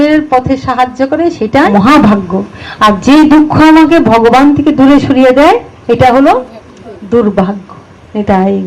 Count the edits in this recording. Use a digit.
1